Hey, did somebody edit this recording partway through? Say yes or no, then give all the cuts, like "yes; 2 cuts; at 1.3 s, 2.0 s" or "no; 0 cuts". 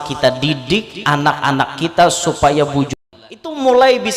yes; 1 cut; at 3.0 s